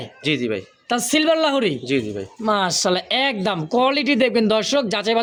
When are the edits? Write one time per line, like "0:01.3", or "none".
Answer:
none